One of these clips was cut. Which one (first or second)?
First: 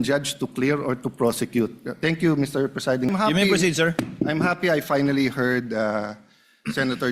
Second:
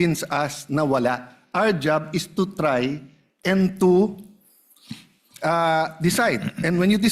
first